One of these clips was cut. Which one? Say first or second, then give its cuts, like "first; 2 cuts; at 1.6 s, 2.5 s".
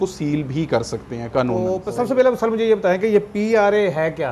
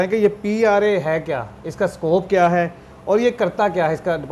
first; 1 cut; at 1.8 s